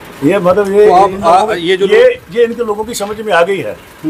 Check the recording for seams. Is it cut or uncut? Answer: uncut